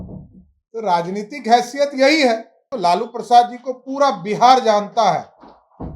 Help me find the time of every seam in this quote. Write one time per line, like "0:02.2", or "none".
0:02.7